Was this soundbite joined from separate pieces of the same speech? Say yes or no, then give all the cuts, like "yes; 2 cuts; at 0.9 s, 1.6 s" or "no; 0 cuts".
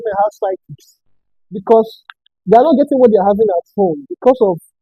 no; 0 cuts